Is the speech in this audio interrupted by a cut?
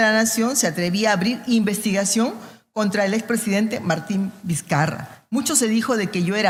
no; 0 cuts

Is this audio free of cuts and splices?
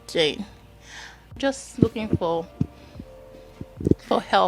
no; 1 cut; at 1.4 s

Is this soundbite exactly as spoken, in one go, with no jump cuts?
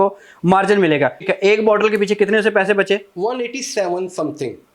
no; 1 cut; at 1.3 s

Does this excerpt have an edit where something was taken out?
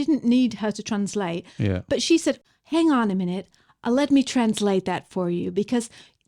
yes; 1 cut; at 2.4 s

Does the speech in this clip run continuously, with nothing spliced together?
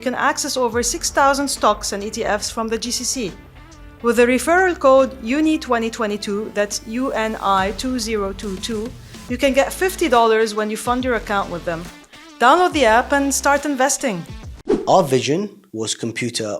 no; 2 cuts; at 14.8 s, 15.6 s

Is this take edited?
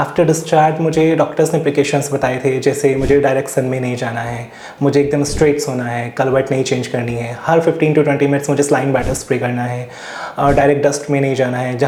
no; 0 cuts

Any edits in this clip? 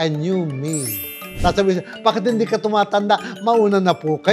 yes; 1 cut; at 1.3 s

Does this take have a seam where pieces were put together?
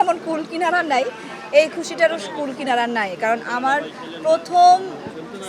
no; 0 cuts

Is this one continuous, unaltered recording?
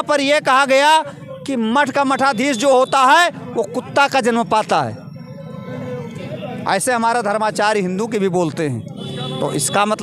yes; 0 cuts

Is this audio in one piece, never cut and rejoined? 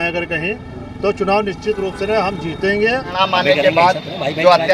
no; 1 cut; at 3.1 s

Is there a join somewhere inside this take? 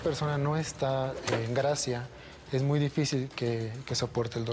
no; 0 cuts

